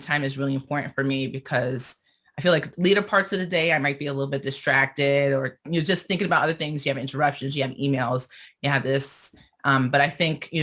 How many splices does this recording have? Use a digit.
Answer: 1